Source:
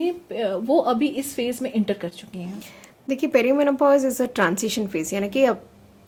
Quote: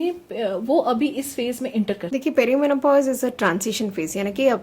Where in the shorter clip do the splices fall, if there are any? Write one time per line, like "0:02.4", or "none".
0:02.0